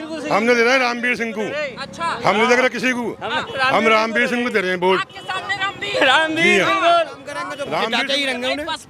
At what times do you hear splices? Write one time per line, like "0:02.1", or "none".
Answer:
0:07.8